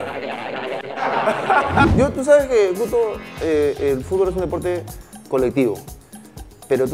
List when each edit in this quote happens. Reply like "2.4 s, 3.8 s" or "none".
1.9 s